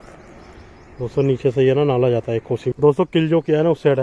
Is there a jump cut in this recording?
yes; 1 cut; at 2.7 s

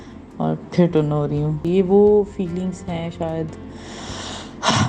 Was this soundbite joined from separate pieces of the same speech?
yes; 1 cut; at 1.6 s

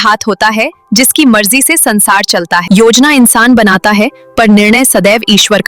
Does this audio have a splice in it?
yes; 1 cut; at 2.6 s

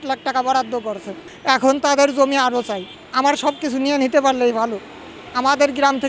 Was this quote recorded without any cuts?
no; 1 cut; at 1.1 s

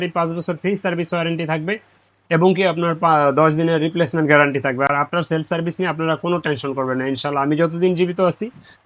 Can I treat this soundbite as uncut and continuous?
yes; 0 cuts

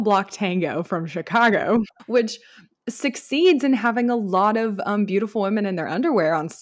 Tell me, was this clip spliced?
yes; 1 cut; at 2.0 s

